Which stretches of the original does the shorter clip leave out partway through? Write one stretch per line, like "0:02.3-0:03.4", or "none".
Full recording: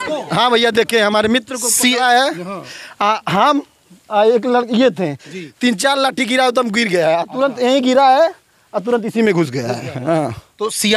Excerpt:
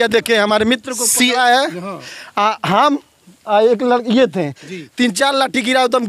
none